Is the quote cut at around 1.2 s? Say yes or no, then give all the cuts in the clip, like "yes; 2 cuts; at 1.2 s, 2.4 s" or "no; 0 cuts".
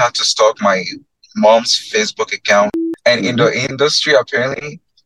no; 1 cut; at 2.8 s